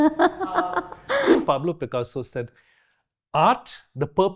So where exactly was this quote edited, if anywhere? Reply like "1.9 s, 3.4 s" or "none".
1.4 s